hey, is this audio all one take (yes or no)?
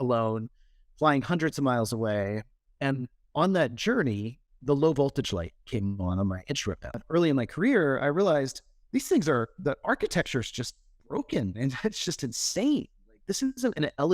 no